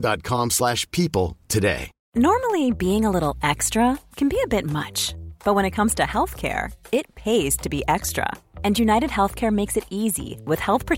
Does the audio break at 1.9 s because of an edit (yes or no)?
yes